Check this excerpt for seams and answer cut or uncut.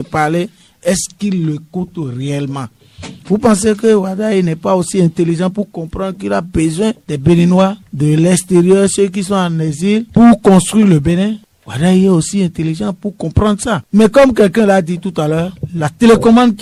uncut